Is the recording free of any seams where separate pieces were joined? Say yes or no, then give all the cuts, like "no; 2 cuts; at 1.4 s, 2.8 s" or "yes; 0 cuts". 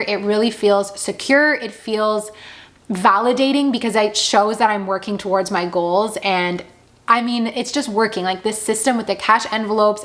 yes; 0 cuts